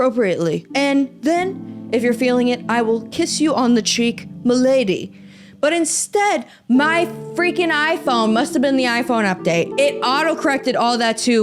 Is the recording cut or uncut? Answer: uncut